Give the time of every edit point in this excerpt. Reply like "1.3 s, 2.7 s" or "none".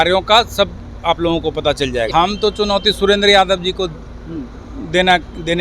2.1 s